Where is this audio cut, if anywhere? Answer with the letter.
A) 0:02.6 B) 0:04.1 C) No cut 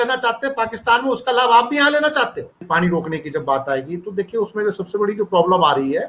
A